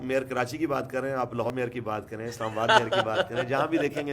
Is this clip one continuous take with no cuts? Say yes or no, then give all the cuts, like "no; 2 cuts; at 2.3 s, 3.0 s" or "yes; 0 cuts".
no; 1 cut; at 1.5 s